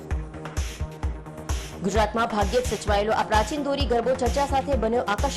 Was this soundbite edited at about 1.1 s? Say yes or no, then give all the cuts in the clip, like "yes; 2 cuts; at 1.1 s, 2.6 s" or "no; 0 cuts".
yes; 1 cut; at 1.1 s